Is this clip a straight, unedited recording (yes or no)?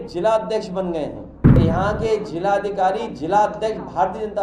no